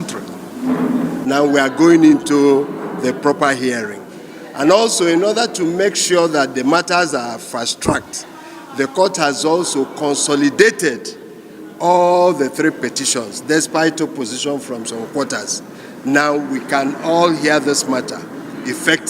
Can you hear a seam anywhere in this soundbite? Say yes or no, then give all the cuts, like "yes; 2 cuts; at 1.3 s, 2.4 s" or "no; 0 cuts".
yes; 1 cut; at 1.2 s